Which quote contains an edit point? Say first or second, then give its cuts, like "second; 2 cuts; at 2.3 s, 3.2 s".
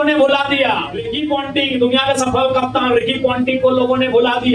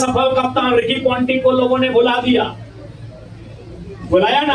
first; 1 cut; at 1.2 s